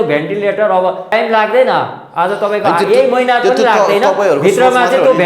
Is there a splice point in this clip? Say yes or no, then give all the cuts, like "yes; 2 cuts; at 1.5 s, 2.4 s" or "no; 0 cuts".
yes; 1 cut; at 1.1 s